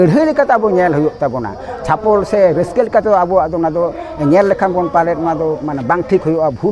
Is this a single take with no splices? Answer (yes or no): yes